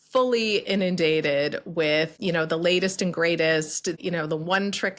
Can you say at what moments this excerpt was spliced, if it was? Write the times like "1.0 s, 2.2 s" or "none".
2.2 s, 4.0 s